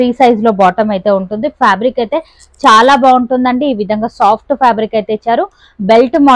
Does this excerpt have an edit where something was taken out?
no; 0 cuts

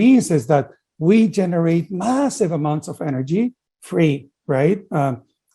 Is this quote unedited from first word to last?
no; 1 cut; at 3.7 s

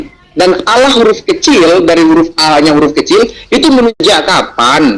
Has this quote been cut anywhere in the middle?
yes; 1 cut; at 4.0 s

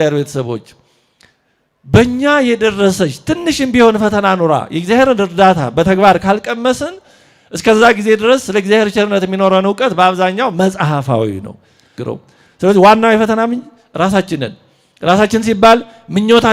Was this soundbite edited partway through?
yes; 1 cut; at 11.9 s

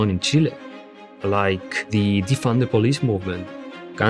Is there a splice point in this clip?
no; 0 cuts

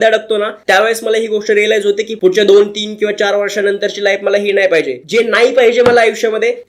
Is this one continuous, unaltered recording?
no; 1 cut; at 5.0 s

